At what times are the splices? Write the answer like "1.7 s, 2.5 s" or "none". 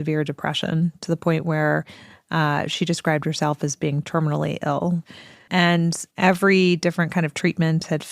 5.1 s